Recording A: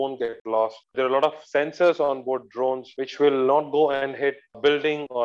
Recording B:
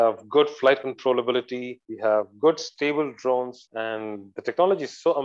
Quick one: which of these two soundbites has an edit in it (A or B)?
A